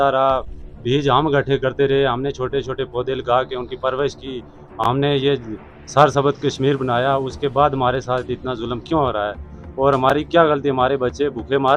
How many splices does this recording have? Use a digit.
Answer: 0